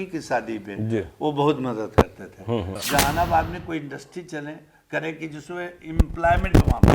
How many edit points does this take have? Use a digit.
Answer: 1